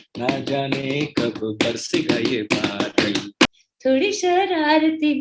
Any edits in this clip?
yes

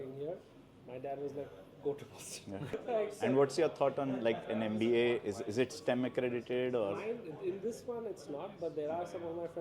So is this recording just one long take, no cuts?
no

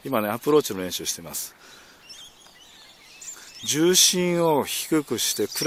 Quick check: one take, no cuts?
yes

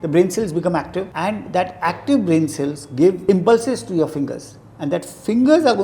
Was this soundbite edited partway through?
yes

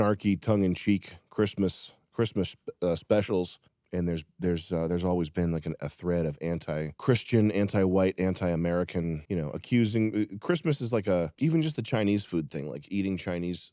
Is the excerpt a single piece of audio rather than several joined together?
yes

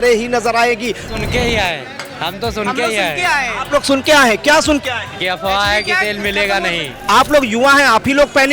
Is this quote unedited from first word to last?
no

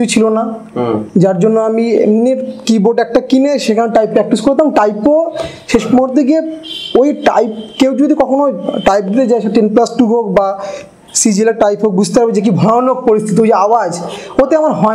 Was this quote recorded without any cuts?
yes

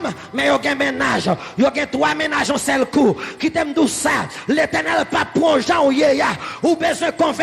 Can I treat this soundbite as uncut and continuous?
yes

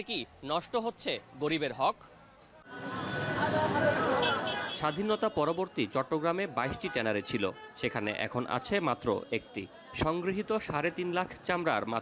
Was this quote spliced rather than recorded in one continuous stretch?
no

